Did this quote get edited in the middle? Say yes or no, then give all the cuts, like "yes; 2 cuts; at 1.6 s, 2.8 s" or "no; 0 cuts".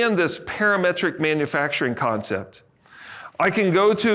no; 0 cuts